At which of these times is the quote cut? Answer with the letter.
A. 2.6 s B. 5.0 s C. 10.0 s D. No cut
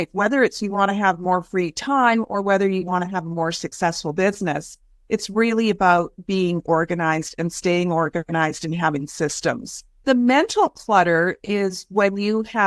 C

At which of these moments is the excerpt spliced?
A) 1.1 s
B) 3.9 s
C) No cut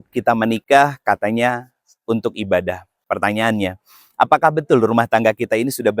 C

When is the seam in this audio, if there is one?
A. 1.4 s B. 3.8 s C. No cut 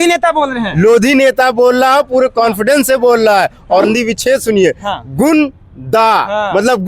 B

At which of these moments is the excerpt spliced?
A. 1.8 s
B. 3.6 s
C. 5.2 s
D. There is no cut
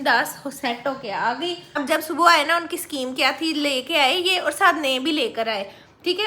A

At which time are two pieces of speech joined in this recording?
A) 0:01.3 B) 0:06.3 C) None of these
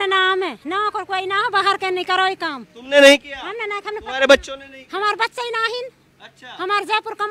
C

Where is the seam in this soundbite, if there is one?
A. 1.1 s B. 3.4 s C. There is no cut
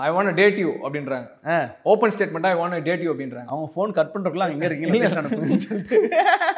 C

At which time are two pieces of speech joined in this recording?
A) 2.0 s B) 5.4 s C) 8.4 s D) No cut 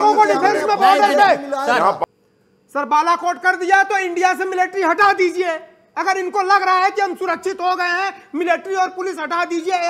A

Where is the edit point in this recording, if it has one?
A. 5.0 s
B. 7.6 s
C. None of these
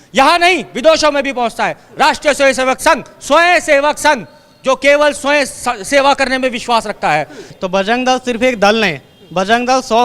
B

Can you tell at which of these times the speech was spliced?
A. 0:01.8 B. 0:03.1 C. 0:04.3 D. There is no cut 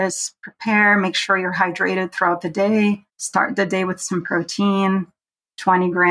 B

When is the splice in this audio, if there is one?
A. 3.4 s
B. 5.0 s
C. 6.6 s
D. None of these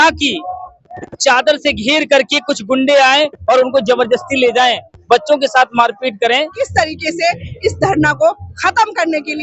C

